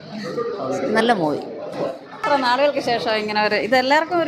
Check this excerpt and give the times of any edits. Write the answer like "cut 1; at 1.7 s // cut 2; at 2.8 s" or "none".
cut 1; at 2.2 s